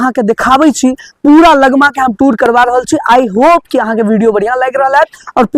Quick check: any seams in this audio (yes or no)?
no